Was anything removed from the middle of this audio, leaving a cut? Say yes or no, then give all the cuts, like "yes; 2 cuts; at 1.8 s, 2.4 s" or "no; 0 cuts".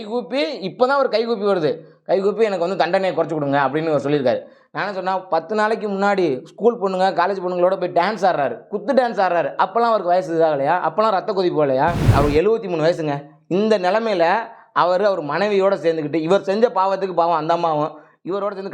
yes; 1 cut; at 12.1 s